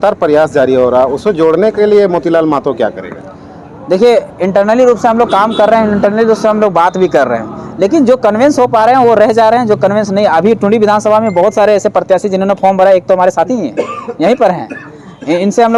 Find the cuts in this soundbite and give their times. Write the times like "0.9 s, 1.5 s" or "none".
none